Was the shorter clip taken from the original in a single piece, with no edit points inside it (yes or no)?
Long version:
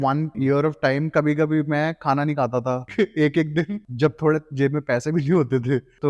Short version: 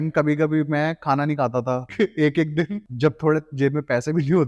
yes